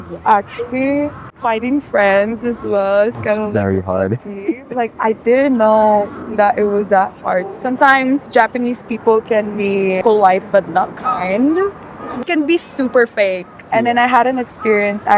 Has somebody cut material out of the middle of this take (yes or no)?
yes